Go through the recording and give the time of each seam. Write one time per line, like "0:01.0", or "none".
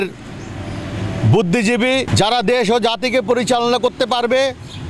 0:02.1